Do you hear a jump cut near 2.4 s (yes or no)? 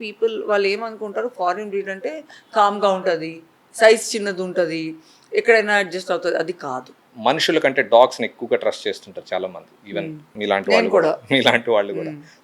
no